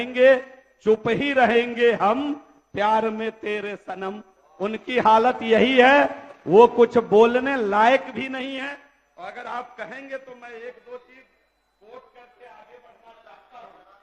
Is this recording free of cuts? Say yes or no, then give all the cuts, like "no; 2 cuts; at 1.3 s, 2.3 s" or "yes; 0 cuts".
yes; 0 cuts